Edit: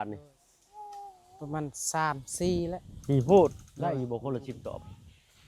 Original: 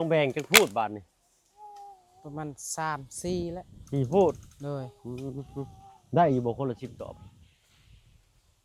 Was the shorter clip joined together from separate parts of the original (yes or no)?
yes